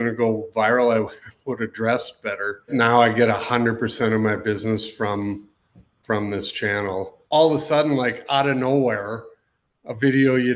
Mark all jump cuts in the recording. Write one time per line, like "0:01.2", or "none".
0:02.7
0:07.2

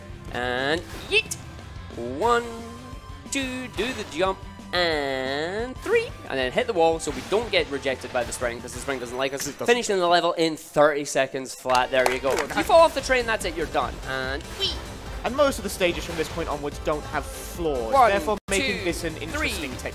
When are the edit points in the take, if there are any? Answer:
0:12.5

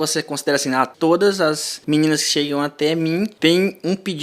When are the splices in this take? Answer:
0:00.9
0:01.7
0:03.3

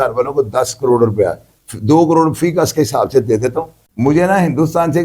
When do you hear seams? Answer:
0:03.8

